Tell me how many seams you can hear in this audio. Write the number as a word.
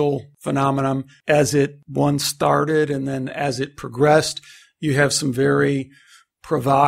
two